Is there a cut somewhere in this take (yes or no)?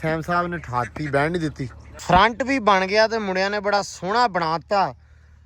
yes